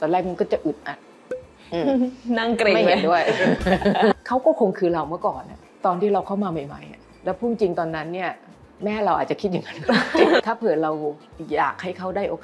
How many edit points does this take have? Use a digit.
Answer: 2